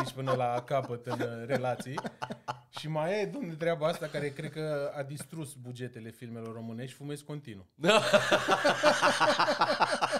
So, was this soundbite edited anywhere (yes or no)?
no